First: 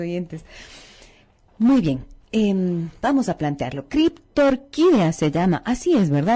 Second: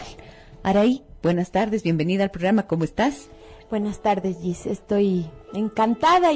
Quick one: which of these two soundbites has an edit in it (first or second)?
second